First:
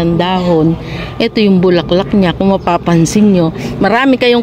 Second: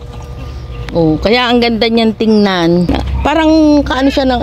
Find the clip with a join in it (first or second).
second